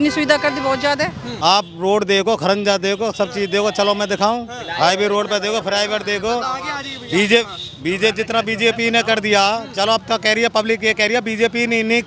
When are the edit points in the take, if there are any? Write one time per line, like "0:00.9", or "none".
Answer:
0:01.2